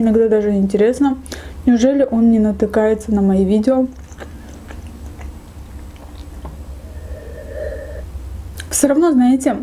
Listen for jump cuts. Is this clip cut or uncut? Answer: uncut